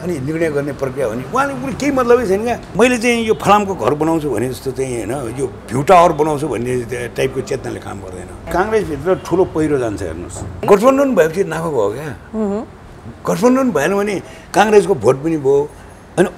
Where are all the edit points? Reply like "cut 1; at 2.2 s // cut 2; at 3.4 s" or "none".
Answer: cut 1; at 2.6 s // cut 2; at 8.5 s // cut 3; at 10.6 s